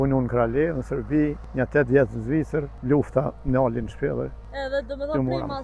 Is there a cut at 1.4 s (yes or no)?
yes